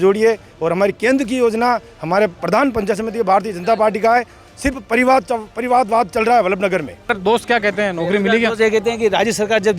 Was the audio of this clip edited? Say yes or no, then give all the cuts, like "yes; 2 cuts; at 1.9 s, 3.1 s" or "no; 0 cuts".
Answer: yes; 1 cut; at 7.1 s